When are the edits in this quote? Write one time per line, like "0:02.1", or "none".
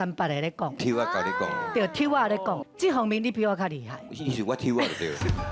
0:02.6